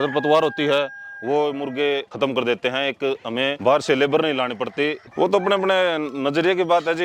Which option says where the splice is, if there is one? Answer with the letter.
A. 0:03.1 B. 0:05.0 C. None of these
B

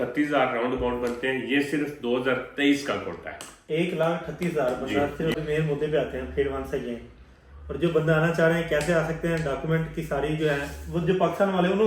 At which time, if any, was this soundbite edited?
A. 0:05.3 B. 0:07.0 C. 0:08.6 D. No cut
A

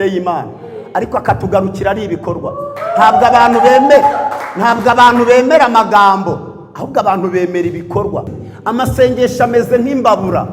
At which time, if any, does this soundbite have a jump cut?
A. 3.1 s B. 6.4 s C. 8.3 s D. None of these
C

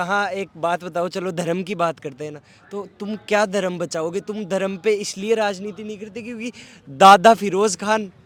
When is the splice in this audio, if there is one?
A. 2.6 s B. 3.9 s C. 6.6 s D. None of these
D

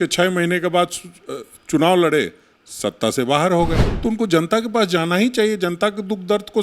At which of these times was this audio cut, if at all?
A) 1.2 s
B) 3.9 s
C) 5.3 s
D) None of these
B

